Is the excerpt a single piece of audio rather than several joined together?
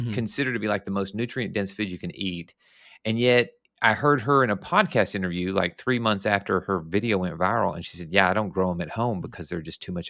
yes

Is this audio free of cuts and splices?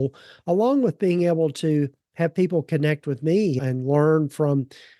no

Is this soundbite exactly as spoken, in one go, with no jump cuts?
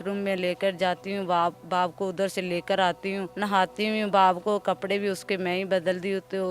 no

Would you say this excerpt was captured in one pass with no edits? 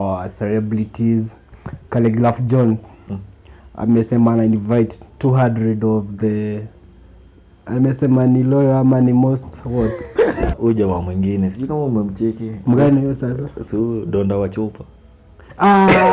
no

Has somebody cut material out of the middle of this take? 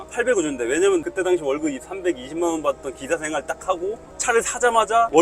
yes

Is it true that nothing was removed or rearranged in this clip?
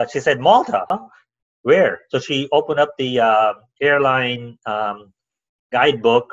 no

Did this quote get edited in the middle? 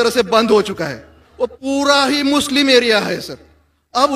yes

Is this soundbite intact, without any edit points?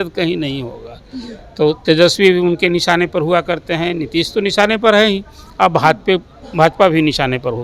yes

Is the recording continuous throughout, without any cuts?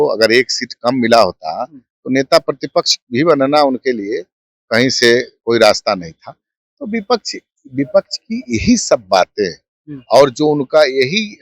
yes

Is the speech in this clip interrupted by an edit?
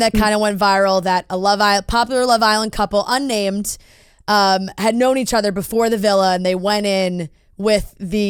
no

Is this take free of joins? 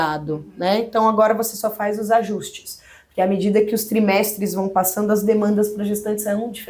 yes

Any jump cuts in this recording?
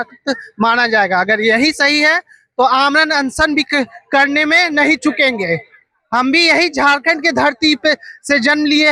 no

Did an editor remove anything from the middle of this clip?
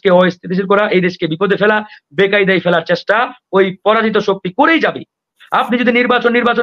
yes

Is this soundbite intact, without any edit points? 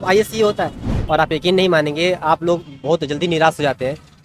no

